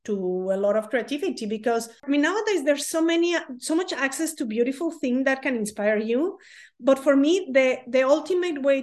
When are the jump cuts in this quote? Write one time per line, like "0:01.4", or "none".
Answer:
0:02.0